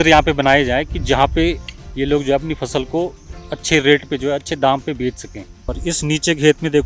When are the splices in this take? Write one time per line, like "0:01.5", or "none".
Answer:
0:05.8